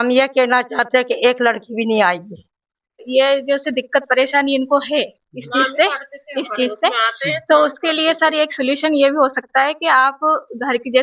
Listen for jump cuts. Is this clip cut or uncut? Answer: cut